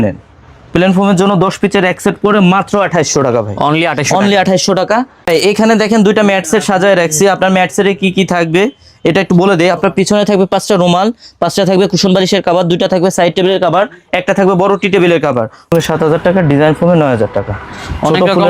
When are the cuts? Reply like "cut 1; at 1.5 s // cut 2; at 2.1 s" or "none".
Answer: cut 1; at 5.2 s // cut 2; at 15.7 s